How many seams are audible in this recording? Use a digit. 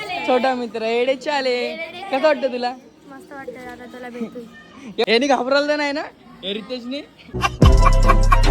1